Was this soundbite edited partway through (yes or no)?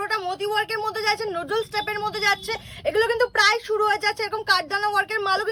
no